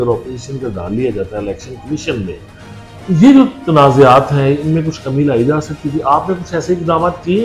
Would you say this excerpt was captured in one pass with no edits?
yes; 0 cuts

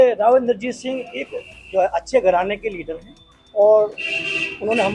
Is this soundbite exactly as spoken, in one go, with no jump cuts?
yes; 0 cuts

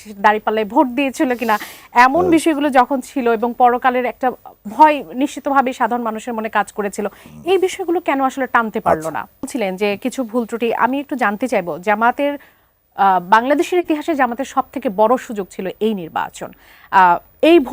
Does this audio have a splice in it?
yes; 1 cut; at 9.4 s

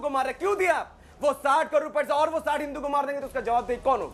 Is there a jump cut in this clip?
no; 0 cuts

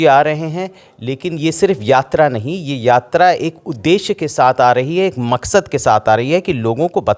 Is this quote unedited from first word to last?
yes; 0 cuts

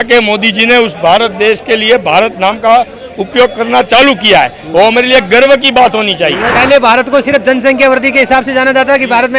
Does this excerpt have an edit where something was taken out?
yes; 1 cut; at 6.5 s

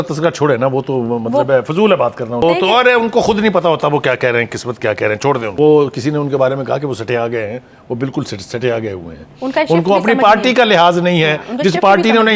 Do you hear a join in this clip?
yes; 2 cuts; at 2.4 s, 5.5 s

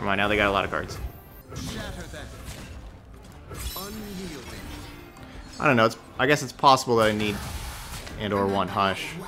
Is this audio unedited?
no; 2 cuts; at 1.3 s, 3.3 s

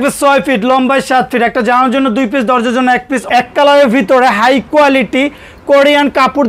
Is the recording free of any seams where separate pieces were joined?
no; 1 cut; at 3.2 s

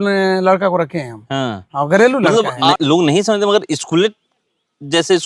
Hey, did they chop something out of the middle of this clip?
yes; 1 cut; at 2.7 s

